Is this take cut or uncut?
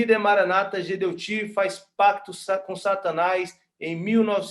uncut